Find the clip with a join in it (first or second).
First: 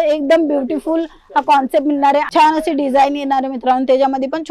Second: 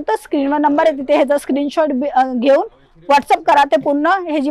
first